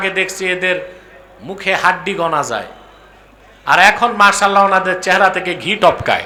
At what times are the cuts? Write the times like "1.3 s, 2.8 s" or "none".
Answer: none